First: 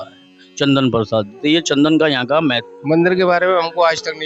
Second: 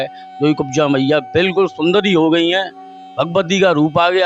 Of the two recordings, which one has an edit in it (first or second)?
first